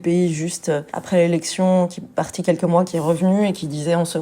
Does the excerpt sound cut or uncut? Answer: cut